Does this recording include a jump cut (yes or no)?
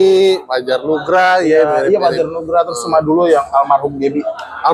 no